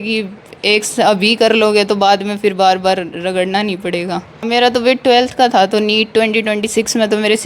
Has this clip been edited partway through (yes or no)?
yes